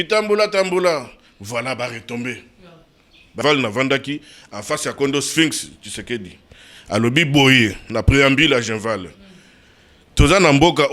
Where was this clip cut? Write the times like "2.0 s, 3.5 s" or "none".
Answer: 3.4 s

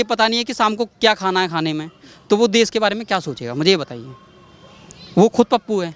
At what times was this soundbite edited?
none

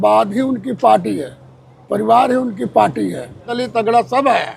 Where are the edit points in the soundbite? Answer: 3.6 s

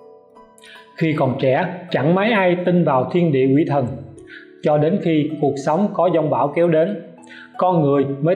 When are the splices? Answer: 0.9 s

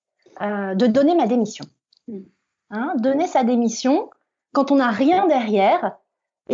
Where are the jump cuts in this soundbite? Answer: none

